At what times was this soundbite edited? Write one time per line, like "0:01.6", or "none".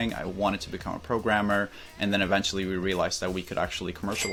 none